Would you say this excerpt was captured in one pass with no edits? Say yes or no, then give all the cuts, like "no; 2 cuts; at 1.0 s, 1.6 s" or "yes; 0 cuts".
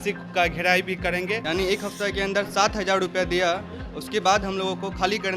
no; 1 cut; at 1.4 s